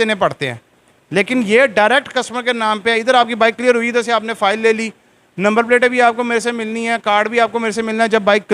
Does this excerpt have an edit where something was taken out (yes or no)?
no